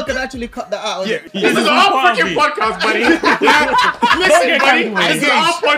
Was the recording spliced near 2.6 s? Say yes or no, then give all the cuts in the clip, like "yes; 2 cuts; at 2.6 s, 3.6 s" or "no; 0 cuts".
no; 1 cut; at 1.2 s